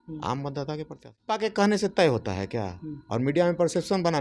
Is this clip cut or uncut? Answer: cut